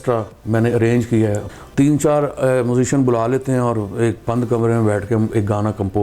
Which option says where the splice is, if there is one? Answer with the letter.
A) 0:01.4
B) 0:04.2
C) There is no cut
A